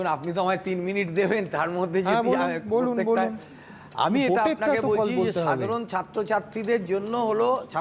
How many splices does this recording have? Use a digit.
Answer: 0